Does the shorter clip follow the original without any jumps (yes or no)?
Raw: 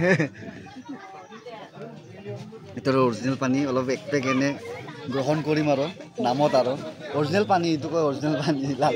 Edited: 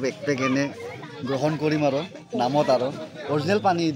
yes